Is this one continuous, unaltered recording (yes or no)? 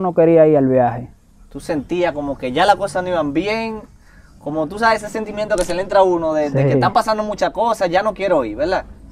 yes